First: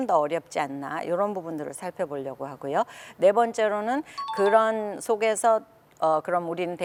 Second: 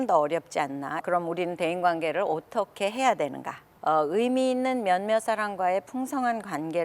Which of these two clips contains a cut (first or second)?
second